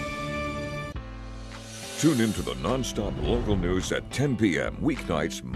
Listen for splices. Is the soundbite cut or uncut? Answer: cut